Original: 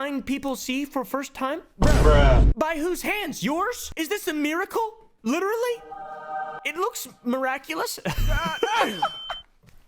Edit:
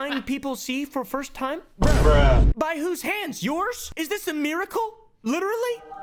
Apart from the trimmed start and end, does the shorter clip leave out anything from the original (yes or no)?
no